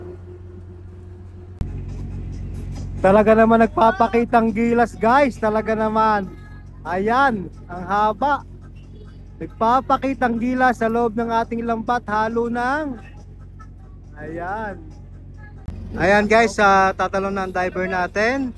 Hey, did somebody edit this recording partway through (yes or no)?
yes